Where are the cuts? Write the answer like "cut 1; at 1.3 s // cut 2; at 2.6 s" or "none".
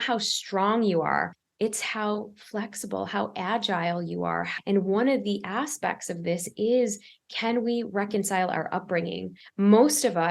cut 1; at 1.4 s // cut 2; at 4.5 s // cut 3; at 9.4 s